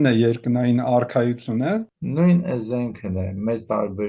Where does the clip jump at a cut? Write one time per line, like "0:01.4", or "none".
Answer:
0:02.0